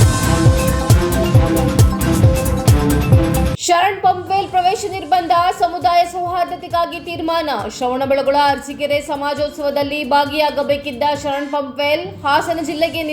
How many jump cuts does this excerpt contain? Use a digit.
1